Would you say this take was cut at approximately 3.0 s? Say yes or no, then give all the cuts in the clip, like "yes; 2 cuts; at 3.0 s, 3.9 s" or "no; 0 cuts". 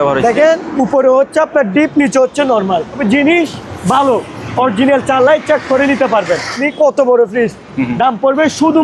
yes; 2 cuts; at 3.0 s, 6.6 s